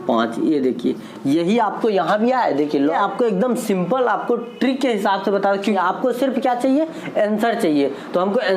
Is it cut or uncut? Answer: cut